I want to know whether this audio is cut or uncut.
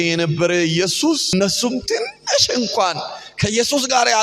cut